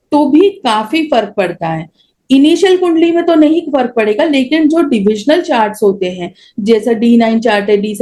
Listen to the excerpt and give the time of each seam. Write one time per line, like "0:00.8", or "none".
none